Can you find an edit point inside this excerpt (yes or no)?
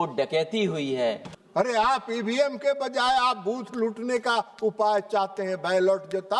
yes